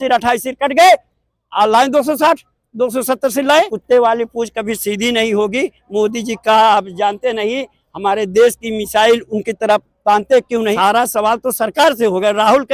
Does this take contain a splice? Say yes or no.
yes